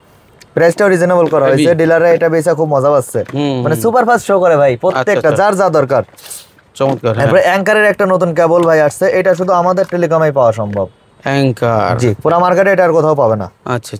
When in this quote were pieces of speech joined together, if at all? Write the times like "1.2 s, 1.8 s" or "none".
none